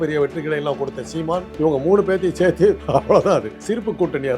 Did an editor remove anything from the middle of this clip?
yes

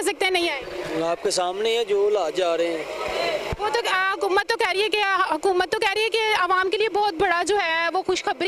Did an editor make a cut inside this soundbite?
no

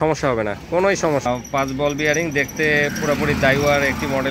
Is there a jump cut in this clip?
yes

